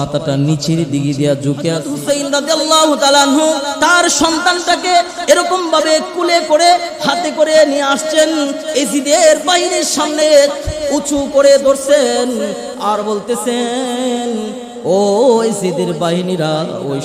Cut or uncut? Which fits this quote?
cut